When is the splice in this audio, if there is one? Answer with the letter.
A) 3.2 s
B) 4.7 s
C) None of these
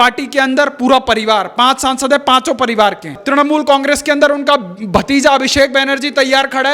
A